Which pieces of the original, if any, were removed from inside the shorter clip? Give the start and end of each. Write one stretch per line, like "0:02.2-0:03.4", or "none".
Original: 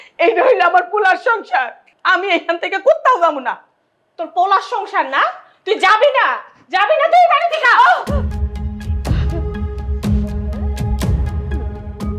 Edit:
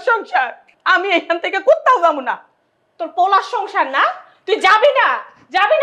none